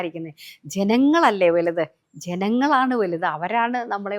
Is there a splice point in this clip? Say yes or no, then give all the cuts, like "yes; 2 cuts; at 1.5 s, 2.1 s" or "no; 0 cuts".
no; 0 cuts